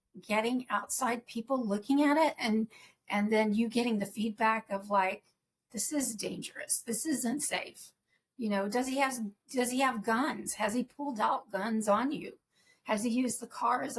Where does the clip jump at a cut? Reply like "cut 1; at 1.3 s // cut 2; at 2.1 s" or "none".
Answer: none